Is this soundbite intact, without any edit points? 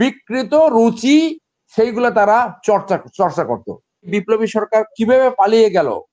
no; 1 cut; at 4.1 s

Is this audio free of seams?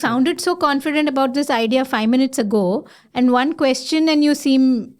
yes; 0 cuts

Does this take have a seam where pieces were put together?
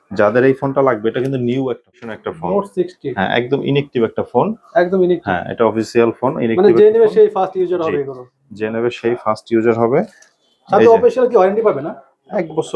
yes; 1 cut; at 2.1 s

